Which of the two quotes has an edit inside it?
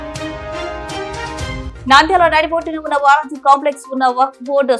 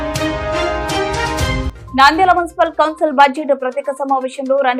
second; 1 cut; at 1.6 s

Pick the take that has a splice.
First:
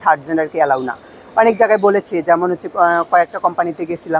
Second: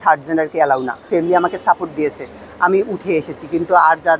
second; 1 cut; at 1.1 s

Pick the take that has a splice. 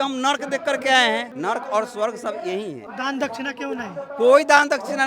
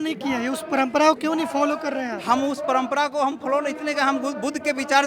first; 2 cuts; at 1.3 s, 2.8 s

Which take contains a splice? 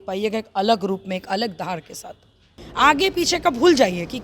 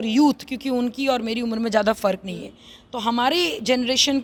first; 1 cut; at 2.6 s

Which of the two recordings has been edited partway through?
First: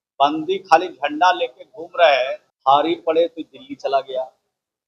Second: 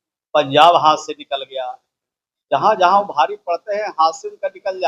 first; 1 cut; at 2.5 s

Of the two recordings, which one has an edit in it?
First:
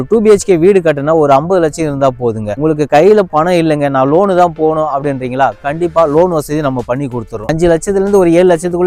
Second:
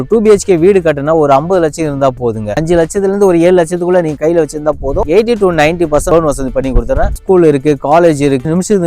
second; 3 cuts; at 2.5 s, 5.0 s, 7.2 s

